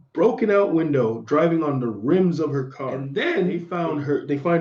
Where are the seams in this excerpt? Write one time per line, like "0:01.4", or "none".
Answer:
0:02.9
0:03.7